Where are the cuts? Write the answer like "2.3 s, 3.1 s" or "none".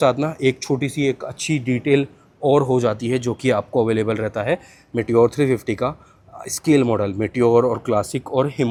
none